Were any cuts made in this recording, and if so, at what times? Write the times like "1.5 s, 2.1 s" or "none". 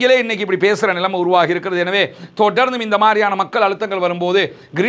none